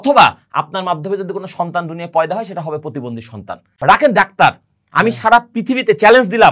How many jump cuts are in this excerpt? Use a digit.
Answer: 1